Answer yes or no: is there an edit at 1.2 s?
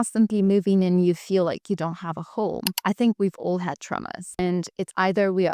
no